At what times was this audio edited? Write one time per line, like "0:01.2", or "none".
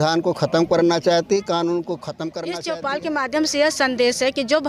0:02.3